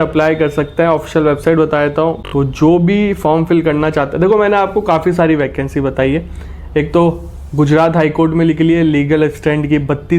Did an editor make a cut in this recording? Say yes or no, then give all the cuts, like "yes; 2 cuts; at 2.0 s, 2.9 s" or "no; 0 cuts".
yes; 1 cut; at 2.2 s